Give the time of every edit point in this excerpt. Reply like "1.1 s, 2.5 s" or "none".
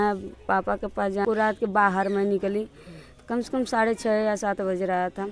1.2 s